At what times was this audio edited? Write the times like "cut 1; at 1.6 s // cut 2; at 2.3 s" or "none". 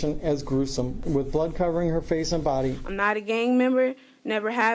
cut 1; at 1.0 s // cut 2; at 2.9 s